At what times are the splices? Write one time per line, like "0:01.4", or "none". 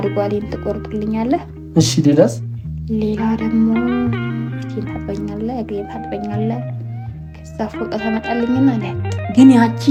none